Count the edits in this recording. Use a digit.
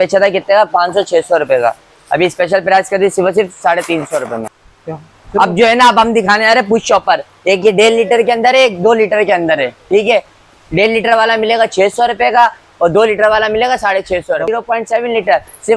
2